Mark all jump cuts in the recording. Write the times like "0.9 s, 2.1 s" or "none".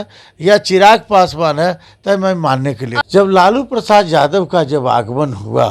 3.0 s